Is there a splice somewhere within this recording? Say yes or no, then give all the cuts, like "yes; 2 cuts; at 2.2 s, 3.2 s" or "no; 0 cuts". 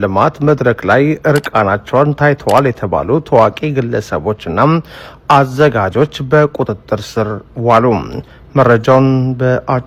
no; 0 cuts